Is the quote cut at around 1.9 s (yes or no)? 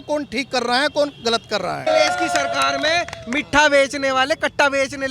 yes